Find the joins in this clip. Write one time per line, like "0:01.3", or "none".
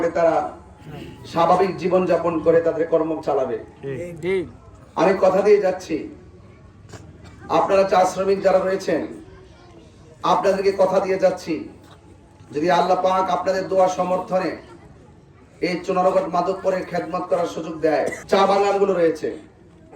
0:18.2